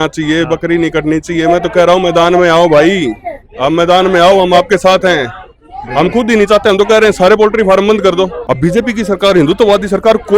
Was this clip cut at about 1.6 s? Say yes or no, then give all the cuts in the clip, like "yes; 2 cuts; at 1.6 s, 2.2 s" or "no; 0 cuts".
no; 1 cut; at 8.4 s